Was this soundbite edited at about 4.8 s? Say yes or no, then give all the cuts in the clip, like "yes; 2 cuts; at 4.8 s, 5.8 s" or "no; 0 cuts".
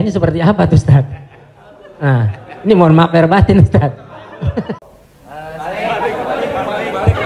yes; 1 cut; at 4.8 s